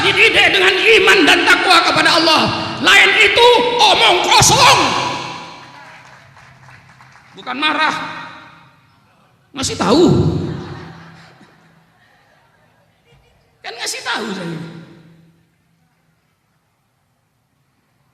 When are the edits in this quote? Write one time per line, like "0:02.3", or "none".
none